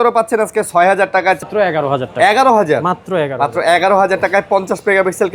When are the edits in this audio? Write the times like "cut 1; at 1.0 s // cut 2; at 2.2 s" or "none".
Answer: cut 1; at 1.4 s

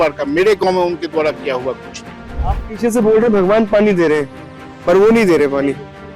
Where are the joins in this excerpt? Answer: cut 1; at 2.5 s

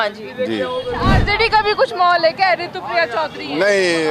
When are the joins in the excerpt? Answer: cut 1; at 1.1 s

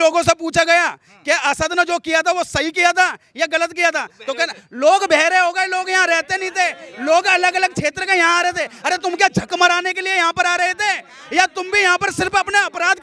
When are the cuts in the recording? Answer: none

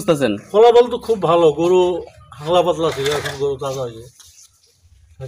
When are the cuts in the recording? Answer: none

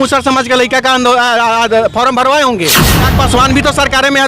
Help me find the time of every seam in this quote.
cut 1; at 3.1 s

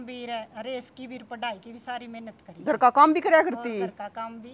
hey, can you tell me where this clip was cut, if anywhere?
none

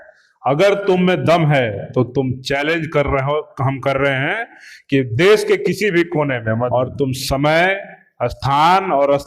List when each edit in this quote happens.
cut 1; at 6.7 s

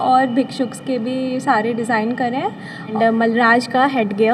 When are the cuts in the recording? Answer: cut 1; at 2.9 s

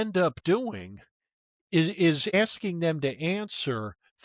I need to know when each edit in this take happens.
cut 1; at 2.3 s

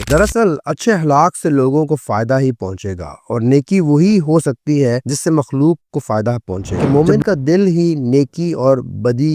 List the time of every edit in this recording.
cut 1; at 6.8 s

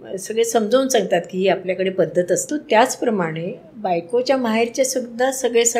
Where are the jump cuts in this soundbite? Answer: cut 1; at 2.5 s

